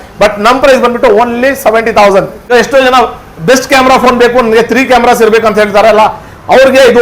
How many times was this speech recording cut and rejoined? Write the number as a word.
one